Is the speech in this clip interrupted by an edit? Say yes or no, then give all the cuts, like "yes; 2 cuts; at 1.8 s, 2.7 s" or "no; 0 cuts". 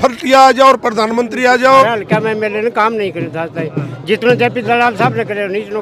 yes; 1 cut; at 1.8 s